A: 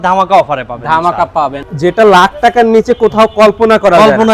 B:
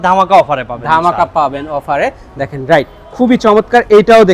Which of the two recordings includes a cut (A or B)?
A